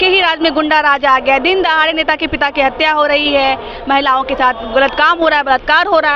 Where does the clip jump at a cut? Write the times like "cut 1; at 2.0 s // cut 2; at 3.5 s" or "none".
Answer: none